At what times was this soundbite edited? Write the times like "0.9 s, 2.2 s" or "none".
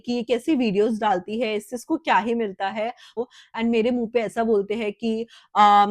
3.2 s